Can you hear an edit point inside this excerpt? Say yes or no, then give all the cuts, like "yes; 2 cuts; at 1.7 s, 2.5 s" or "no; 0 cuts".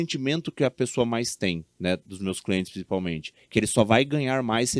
no; 0 cuts